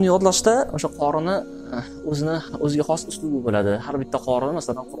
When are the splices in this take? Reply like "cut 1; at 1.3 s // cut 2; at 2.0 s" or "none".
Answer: none